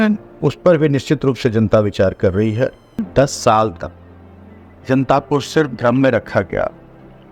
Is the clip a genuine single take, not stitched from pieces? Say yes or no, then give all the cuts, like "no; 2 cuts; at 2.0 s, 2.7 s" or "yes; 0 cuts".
no; 1 cut; at 3.1 s